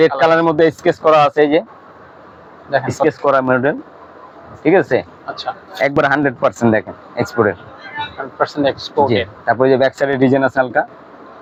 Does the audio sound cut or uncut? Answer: uncut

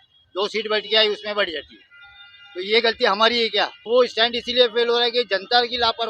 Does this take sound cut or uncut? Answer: cut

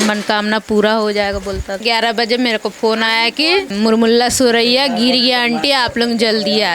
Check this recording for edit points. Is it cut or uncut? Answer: cut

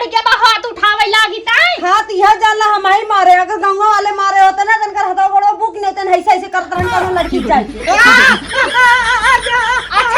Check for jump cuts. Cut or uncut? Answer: uncut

